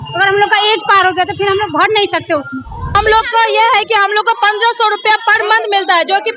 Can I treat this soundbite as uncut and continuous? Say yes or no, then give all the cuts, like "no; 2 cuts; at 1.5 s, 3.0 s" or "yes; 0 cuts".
no; 1 cut; at 2.9 s